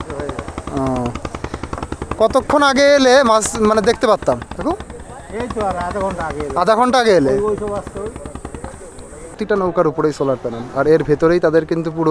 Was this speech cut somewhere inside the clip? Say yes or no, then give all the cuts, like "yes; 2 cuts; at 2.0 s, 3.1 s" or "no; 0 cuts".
yes; 1 cut; at 9.4 s